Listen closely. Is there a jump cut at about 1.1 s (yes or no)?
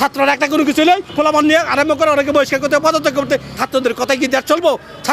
yes